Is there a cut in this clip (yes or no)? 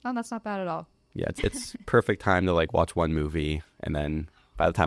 yes